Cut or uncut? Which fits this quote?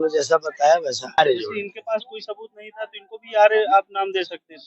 cut